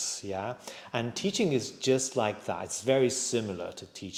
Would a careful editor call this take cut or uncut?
uncut